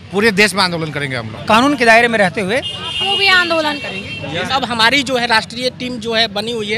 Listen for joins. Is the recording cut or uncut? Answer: cut